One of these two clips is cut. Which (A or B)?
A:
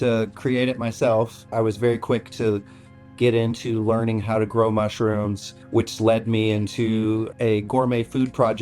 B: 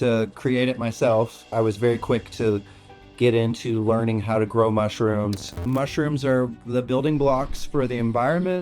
B